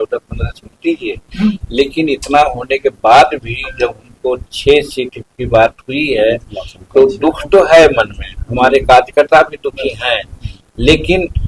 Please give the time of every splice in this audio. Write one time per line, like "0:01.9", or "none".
none